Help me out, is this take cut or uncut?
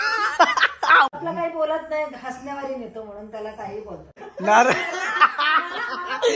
cut